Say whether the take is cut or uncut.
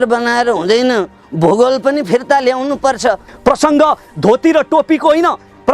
cut